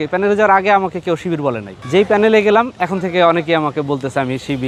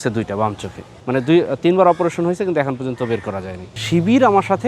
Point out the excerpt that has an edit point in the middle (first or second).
second